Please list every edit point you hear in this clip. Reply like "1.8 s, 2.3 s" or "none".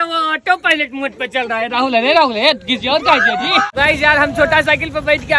3.7 s